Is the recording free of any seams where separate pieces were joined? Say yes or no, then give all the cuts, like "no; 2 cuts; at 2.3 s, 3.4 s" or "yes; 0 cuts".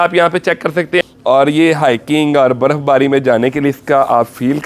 no; 1 cut; at 1.1 s